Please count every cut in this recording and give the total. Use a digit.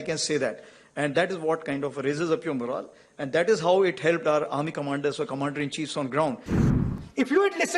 1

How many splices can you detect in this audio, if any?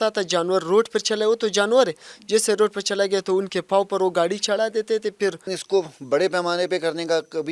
1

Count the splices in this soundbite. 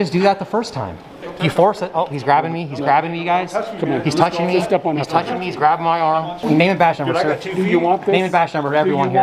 2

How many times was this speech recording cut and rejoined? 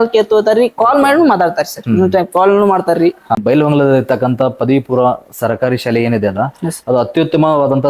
1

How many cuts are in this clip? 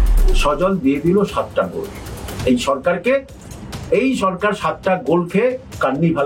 0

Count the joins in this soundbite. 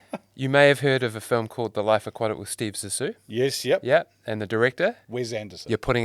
1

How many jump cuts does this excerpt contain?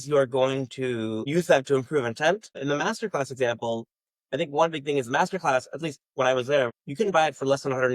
3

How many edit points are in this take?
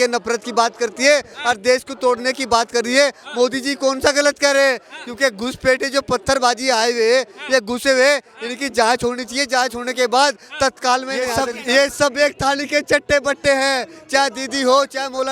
1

